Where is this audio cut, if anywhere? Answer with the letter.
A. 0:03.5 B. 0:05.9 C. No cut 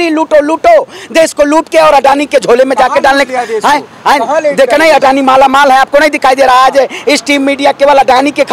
C